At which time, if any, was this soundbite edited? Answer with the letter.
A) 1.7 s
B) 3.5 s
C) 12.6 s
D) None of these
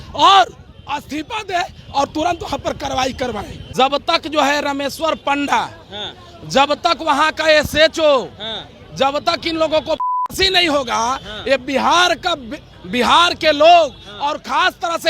B